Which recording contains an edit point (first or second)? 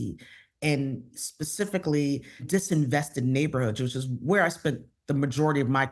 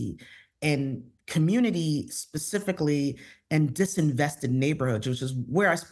first